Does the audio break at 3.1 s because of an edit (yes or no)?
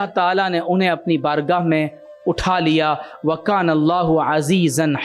no